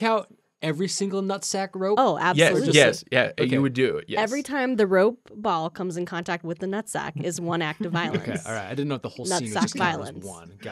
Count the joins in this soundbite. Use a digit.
0